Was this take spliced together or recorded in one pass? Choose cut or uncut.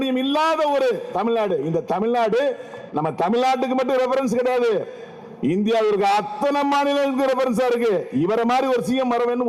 uncut